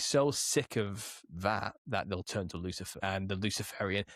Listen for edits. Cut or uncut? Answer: cut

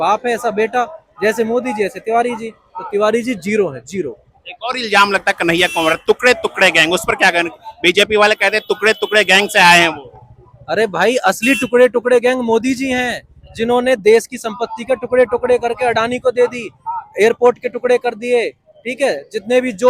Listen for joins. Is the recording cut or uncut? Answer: uncut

